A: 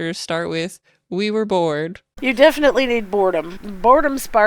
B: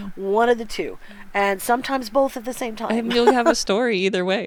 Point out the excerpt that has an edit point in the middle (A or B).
A